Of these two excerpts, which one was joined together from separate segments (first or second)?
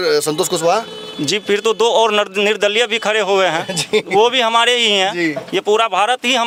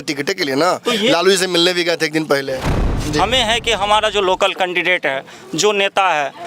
second